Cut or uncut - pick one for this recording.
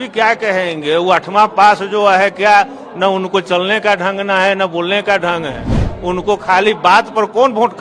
uncut